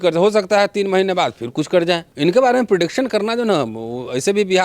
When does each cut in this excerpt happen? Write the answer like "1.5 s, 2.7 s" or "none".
2.1 s